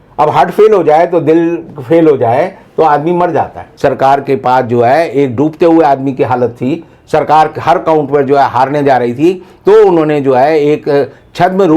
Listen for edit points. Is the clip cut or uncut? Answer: cut